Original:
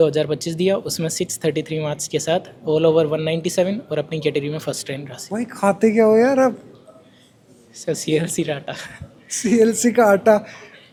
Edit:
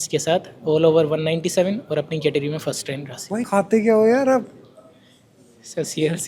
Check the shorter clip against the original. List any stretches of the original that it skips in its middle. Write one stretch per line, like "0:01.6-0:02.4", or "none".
0:05.5-0:05.6